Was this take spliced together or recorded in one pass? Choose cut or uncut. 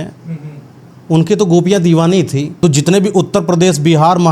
cut